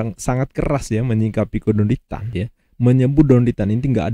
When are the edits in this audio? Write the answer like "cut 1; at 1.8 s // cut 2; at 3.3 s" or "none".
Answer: cut 1; at 2.2 s